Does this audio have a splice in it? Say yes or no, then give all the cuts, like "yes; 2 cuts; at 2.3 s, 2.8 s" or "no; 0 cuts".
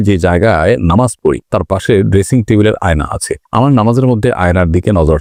no; 0 cuts